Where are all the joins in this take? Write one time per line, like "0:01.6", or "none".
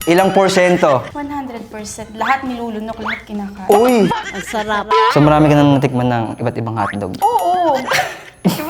0:04.9